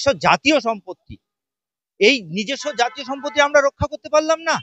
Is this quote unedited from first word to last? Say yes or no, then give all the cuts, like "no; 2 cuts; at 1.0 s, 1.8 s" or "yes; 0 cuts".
yes; 0 cuts